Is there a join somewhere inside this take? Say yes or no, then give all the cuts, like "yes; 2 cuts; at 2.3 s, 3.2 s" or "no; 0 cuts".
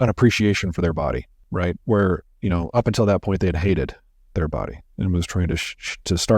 yes; 1 cut; at 1.4 s